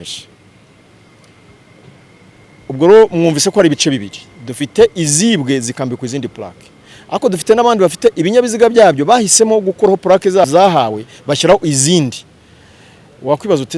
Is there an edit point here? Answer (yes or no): yes